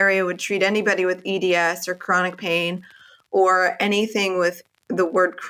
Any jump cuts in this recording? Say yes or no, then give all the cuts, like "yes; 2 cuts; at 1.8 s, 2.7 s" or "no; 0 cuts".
no; 0 cuts